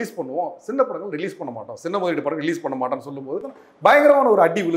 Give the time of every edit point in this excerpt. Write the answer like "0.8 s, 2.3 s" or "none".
3.5 s